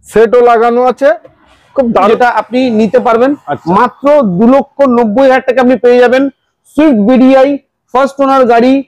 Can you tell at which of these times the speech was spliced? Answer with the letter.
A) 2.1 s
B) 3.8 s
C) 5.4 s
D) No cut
A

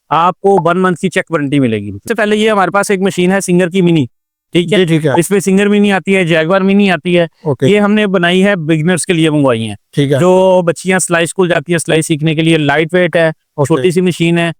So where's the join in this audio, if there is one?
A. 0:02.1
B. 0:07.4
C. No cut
A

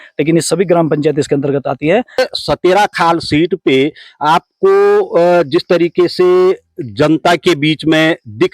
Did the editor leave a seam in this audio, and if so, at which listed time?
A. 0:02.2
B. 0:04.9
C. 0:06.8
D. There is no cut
A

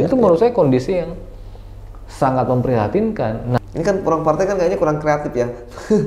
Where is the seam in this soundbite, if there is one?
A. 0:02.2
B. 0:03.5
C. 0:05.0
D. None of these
B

